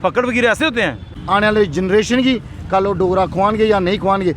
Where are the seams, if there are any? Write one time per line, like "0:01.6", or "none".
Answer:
0:01.1